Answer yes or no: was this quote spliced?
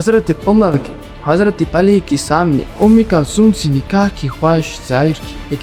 no